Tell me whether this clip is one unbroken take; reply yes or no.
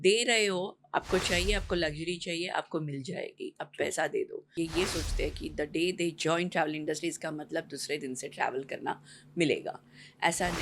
no